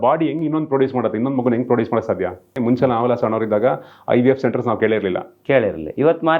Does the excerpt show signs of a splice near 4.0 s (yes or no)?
no